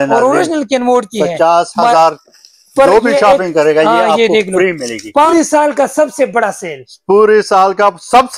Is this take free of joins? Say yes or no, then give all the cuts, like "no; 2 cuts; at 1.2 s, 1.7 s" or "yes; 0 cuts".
no; 1 cut; at 5.3 s